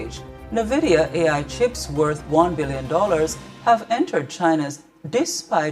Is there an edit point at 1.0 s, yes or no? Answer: yes